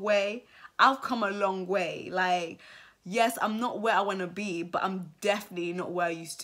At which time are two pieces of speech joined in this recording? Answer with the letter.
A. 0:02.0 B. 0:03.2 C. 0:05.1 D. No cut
D